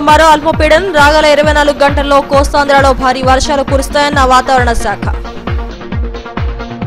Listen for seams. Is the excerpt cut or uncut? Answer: uncut